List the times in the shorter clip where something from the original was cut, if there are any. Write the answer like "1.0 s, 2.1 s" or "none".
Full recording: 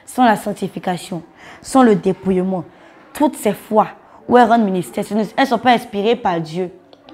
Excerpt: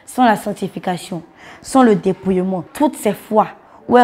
2.7 s